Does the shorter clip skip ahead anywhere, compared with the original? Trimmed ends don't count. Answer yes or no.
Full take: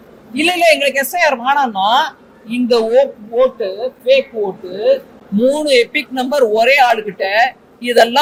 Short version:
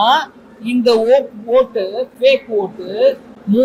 no